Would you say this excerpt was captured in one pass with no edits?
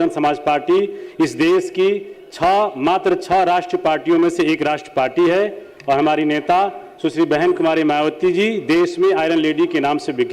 yes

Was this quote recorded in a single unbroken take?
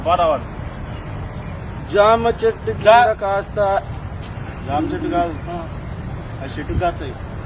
yes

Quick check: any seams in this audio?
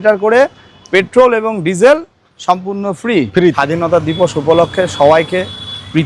yes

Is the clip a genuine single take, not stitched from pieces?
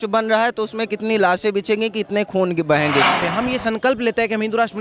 no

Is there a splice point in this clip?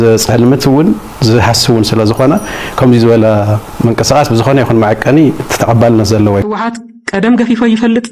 yes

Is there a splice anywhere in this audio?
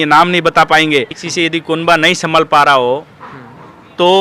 yes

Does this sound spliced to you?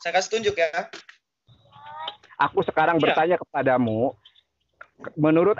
yes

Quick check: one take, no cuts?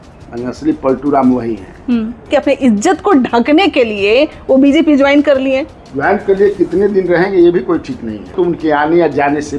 no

